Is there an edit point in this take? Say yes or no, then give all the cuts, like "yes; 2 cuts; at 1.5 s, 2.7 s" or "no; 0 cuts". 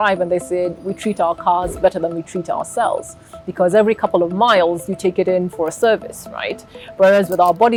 no; 0 cuts